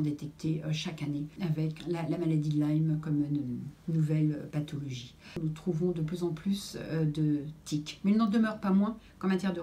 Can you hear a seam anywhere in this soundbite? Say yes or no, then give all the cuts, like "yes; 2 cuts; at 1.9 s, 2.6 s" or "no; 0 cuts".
yes; 2 cuts; at 1.7 s, 5.3 s